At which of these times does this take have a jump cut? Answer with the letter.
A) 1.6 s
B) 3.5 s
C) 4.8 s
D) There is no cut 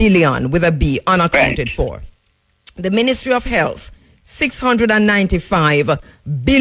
D